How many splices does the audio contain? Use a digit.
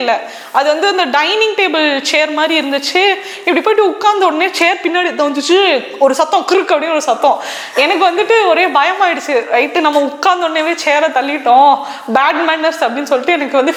0